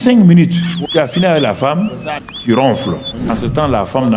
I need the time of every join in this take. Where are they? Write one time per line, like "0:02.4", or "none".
0:00.8
0:02.3
0:03.2